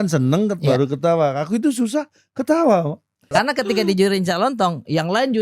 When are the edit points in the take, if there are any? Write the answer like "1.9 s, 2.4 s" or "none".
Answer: 3.2 s